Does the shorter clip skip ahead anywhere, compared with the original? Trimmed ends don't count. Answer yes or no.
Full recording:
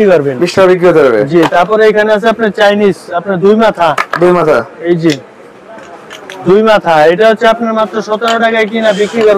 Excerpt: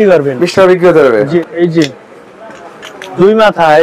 yes